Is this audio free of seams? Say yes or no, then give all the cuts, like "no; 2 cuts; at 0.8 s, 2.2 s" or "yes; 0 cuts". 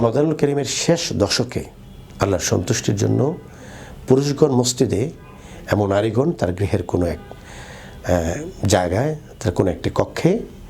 yes; 0 cuts